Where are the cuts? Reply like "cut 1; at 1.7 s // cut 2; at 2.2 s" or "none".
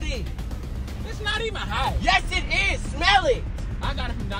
none